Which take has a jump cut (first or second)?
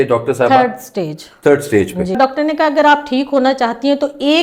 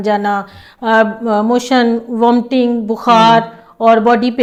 first